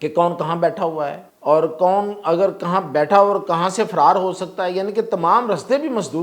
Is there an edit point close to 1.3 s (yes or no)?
yes